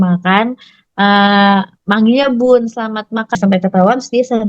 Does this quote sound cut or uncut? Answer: cut